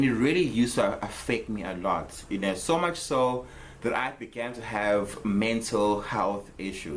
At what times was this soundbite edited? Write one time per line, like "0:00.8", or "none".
none